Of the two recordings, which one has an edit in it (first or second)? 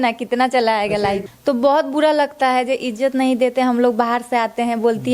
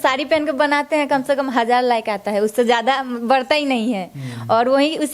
first